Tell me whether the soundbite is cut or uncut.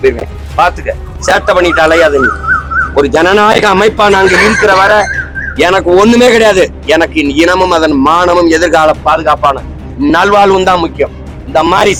uncut